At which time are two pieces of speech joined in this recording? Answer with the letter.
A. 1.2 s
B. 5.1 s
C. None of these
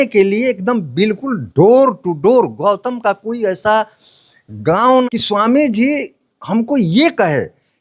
B